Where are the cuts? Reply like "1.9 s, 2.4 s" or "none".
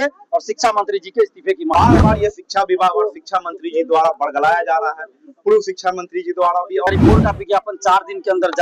1.7 s, 6.9 s